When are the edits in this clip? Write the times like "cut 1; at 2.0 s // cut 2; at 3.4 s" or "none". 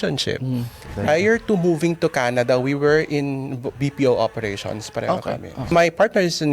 cut 1; at 1.0 s // cut 2; at 3.8 s // cut 3; at 5.7 s